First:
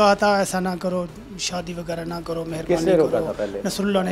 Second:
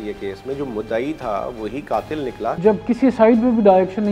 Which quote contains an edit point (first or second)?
second